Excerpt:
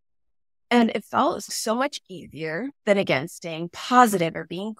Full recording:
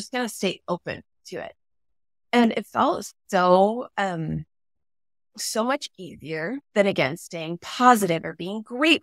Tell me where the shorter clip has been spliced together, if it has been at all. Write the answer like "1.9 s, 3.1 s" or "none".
1.5 s